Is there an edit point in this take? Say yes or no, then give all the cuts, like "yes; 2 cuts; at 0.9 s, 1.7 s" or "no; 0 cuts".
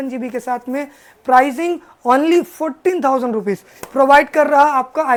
no; 0 cuts